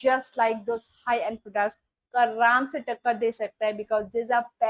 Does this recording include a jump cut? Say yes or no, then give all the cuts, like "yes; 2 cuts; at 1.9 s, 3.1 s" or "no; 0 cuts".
no; 0 cuts